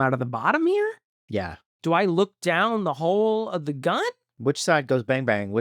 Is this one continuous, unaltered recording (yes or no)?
no